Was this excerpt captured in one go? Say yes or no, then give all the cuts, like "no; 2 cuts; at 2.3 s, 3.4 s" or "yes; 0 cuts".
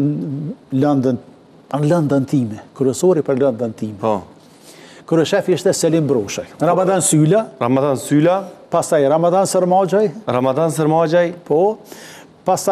no; 1 cut; at 6.6 s